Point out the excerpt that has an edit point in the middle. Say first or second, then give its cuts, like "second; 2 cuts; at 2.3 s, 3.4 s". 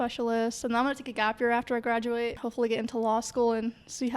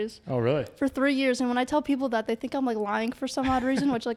first; 1 cut; at 2.4 s